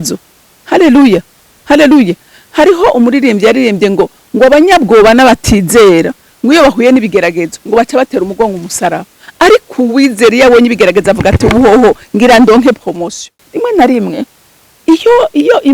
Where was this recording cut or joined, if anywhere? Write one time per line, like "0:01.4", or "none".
0:13.3